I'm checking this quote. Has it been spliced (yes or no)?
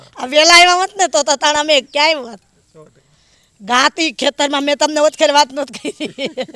no